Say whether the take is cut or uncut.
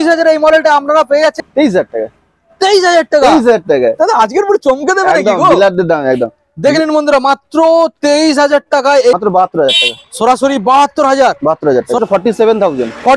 cut